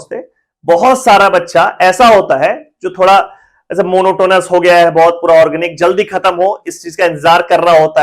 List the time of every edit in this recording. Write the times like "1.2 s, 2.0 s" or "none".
none